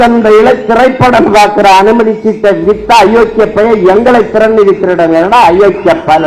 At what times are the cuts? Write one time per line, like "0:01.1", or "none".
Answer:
none